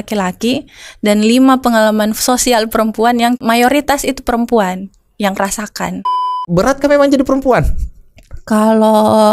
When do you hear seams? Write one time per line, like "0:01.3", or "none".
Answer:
0:03.4
0:06.1